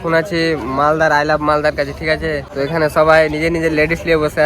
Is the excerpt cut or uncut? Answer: cut